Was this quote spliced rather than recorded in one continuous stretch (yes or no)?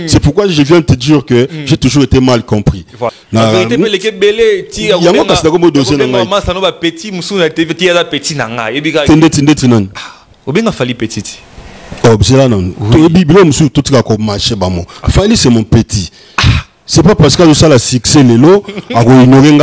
yes